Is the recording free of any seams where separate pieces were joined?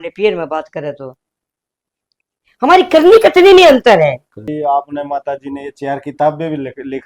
no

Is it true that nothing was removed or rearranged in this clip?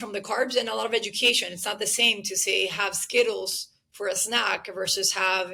yes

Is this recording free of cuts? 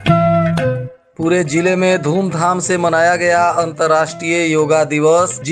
no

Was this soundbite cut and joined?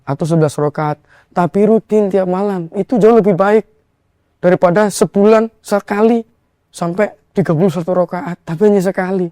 yes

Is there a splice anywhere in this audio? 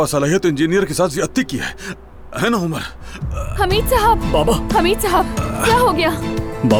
no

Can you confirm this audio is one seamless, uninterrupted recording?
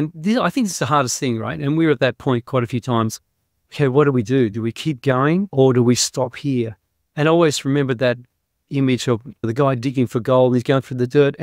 no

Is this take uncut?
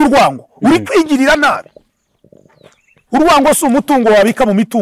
yes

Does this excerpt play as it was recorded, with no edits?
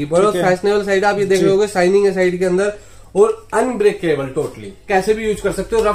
no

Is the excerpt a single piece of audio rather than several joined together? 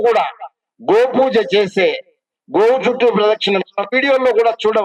yes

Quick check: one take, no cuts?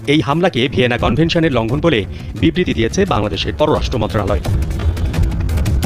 yes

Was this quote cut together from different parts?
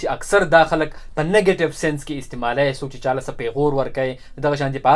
no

